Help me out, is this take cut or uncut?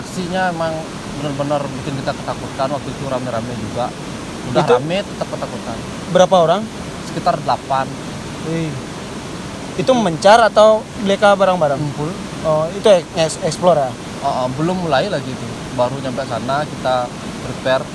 uncut